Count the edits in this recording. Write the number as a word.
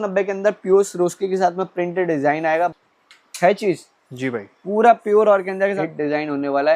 two